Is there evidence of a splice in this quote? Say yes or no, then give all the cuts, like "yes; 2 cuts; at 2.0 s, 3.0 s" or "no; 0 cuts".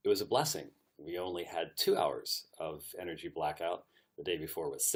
no; 0 cuts